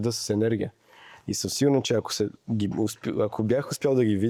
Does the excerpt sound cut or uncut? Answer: uncut